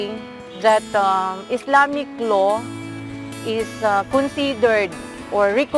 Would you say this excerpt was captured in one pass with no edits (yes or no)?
no